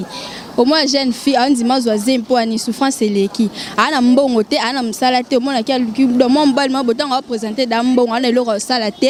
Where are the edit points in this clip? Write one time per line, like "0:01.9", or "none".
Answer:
none

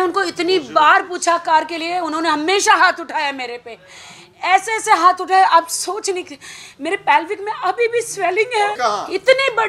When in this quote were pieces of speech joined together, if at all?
0:08.8

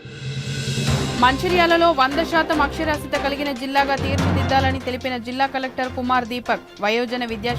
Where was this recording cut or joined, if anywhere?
0:01.1

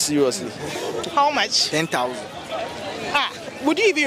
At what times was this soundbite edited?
0:01.0

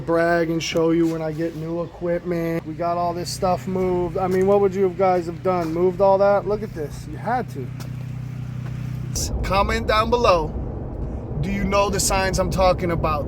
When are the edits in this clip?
0:02.6
0:09.1

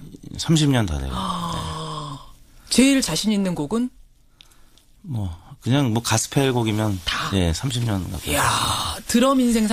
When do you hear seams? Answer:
0:06.1

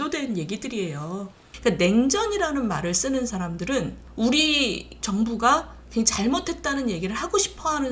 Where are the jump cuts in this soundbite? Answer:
0:01.4
0:04.0
0:05.0

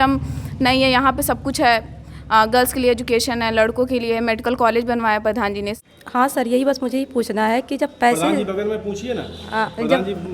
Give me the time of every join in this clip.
0:05.7

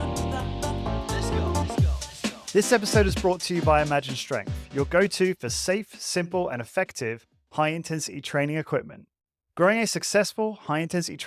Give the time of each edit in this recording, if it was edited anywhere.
0:02.4

